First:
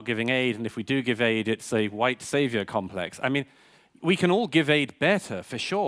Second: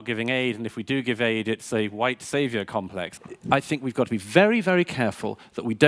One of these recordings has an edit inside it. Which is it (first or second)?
second